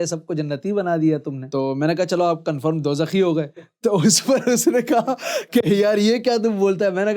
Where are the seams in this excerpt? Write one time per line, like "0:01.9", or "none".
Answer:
0:01.4